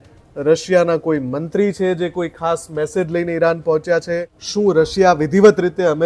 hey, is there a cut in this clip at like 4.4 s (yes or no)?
yes